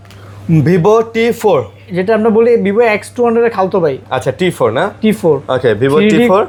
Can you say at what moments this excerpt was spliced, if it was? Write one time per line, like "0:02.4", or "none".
none

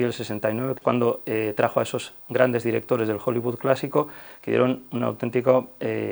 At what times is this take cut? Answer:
none

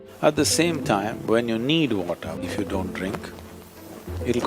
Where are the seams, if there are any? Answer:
0:02.4

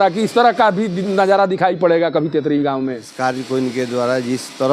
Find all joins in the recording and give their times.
0:03.1

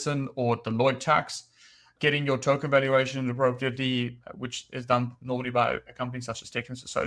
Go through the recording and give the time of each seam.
none

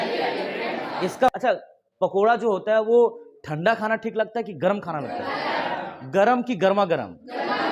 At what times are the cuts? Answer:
0:01.3

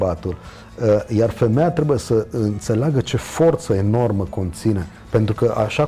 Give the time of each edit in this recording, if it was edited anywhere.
0:04.9

